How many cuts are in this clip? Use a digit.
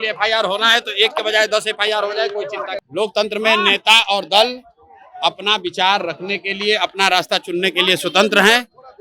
1